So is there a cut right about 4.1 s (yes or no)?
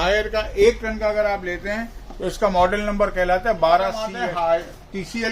yes